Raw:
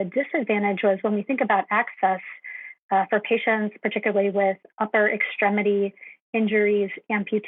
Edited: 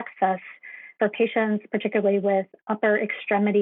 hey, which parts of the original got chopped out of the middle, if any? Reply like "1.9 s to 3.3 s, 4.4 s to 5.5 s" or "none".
2.8 s to 3.1 s